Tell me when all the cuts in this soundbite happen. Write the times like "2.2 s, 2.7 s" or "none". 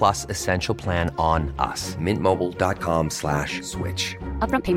none